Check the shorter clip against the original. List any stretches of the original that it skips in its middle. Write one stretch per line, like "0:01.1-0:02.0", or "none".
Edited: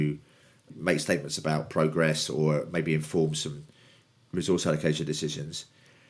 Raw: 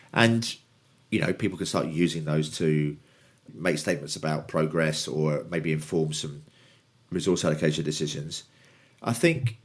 none